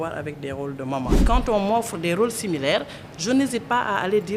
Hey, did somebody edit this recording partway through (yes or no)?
yes